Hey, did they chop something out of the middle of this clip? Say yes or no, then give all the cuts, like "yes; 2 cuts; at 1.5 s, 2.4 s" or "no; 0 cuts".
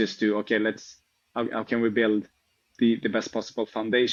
no; 0 cuts